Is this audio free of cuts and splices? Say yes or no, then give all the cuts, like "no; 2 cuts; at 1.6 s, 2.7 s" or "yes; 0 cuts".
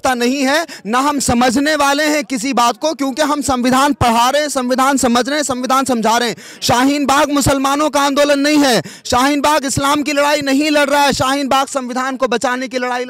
yes; 0 cuts